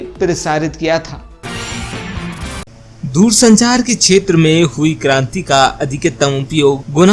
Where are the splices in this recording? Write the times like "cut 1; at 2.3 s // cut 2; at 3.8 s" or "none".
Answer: cut 1; at 1.3 s // cut 2; at 2.6 s